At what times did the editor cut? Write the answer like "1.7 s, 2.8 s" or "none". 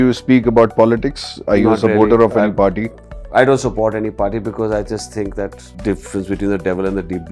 none